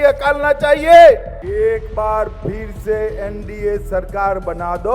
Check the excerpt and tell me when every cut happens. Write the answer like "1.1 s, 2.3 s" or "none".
1.4 s